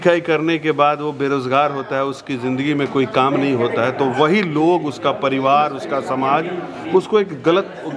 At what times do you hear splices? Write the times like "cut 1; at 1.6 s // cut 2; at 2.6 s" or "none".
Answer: none